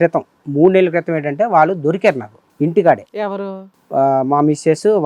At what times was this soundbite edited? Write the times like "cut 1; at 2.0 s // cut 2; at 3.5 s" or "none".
none